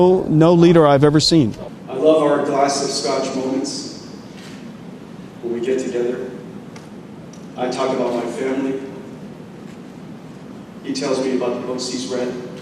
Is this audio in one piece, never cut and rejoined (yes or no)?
no